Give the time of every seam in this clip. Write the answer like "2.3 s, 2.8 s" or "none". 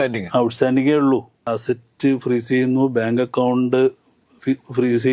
1.5 s